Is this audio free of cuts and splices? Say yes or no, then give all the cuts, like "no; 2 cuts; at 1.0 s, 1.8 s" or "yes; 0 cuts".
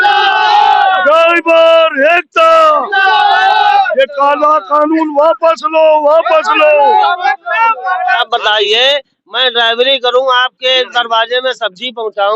no; 1 cut; at 8.2 s